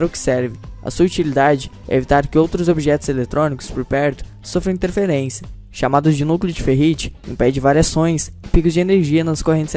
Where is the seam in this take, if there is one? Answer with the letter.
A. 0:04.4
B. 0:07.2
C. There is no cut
A